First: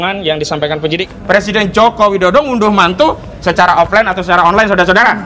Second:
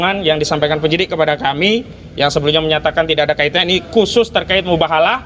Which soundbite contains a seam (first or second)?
first